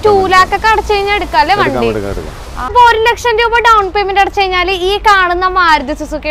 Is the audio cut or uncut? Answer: cut